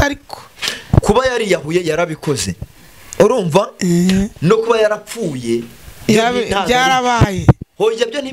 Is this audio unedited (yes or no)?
yes